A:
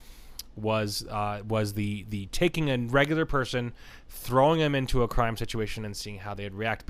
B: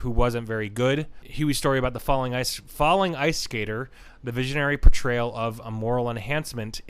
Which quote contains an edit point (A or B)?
B